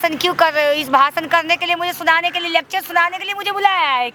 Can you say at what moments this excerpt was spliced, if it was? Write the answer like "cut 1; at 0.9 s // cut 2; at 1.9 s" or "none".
none